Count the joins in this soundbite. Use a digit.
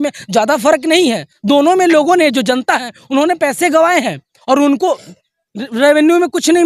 0